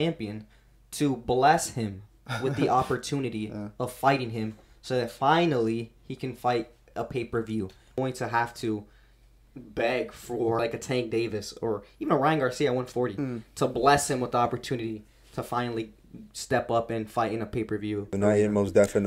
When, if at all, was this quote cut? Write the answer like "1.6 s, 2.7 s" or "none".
8.0 s, 10.6 s, 18.2 s